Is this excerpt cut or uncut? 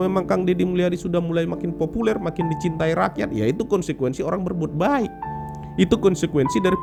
uncut